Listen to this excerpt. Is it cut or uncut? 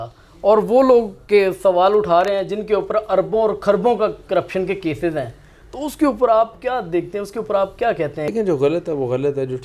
uncut